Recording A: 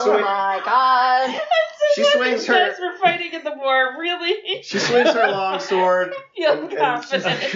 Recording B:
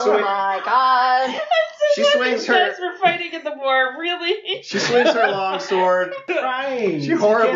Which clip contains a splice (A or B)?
B